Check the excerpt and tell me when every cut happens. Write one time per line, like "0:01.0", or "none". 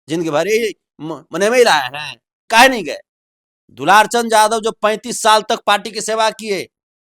0:02.4